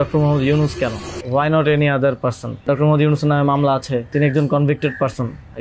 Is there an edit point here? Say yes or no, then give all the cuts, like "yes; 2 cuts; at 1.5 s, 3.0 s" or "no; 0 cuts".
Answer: yes; 3 cuts; at 1.1 s, 2.6 s, 4.1 s